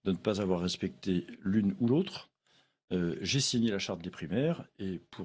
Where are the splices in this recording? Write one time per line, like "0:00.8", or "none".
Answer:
0:03.0